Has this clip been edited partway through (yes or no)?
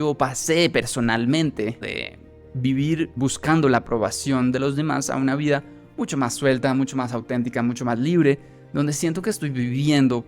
yes